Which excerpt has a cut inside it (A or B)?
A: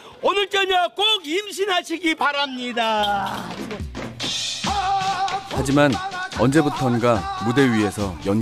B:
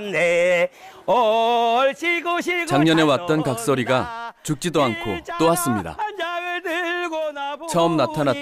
A